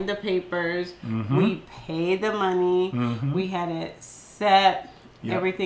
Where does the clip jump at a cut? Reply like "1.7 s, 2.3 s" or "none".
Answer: none